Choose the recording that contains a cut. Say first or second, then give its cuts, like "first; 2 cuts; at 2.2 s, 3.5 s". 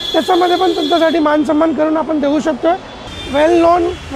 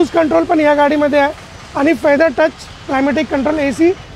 first; 1 cut; at 3.1 s